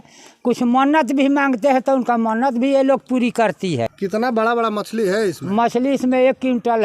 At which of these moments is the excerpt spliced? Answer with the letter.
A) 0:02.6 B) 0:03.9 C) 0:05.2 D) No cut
B